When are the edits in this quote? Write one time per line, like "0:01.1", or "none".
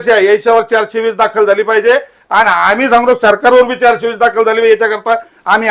none